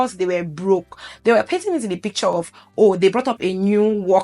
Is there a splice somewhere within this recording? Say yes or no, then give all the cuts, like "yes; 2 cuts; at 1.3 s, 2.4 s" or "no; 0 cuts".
yes; 1 cut; at 1.1 s